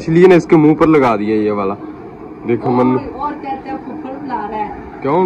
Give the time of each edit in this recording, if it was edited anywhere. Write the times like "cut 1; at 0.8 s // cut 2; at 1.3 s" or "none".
none